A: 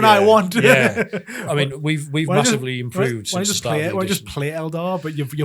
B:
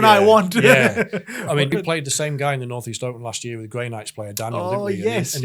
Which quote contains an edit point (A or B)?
B